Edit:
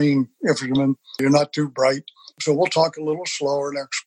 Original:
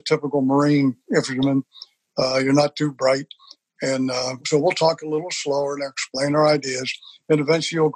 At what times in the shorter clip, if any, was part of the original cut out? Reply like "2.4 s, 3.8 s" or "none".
1.2 s, 2.3 s